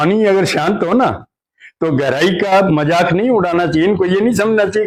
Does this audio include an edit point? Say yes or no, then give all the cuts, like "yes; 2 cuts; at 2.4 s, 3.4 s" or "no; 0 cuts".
no; 0 cuts